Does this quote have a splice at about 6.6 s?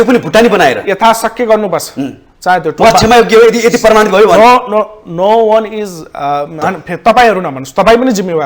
yes; 1 cut; at 6.6 s

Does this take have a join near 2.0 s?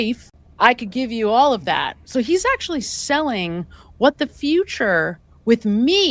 no; 0 cuts

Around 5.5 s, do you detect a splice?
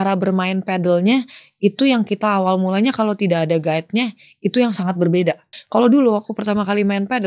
yes; 1 cut; at 5.5 s

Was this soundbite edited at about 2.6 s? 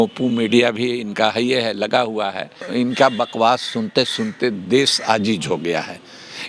yes; 1 cut; at 2.6 s

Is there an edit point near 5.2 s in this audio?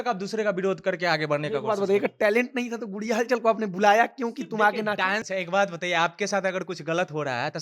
yes; 1 cut; at 5.2 s

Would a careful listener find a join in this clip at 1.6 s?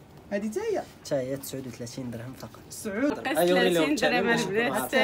no; 1 cut; at 3.1 s

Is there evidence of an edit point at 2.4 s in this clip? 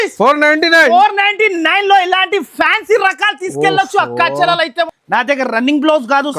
no; 1 cut; at 4.9 s

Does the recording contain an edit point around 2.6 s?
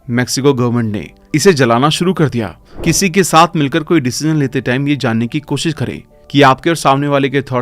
yes; 1 cut; at 2.6 s

